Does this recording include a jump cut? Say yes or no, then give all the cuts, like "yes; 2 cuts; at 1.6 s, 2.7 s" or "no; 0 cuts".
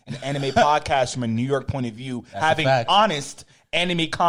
no; 0 cuts